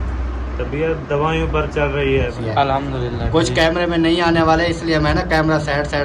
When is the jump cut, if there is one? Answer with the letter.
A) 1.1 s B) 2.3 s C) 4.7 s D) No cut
B